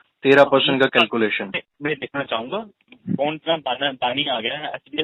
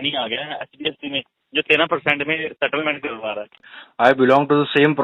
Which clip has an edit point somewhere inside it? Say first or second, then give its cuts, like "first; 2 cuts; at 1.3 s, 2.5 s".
second; 1 cut; at 3.7 s